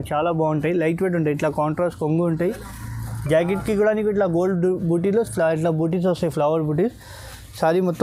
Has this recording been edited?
no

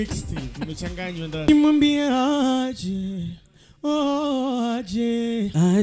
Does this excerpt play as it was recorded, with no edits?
no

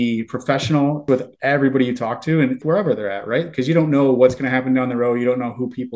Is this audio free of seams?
no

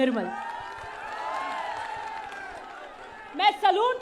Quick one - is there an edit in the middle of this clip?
no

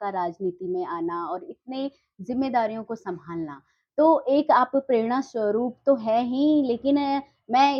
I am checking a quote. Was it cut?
no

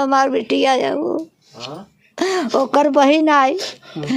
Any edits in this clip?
no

